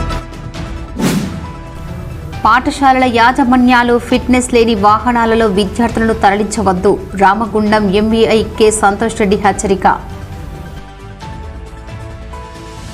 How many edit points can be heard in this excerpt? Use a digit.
1